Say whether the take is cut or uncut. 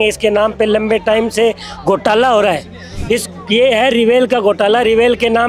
uncut